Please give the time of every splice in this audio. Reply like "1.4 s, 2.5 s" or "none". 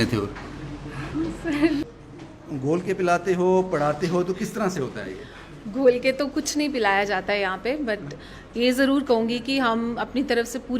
1.9 s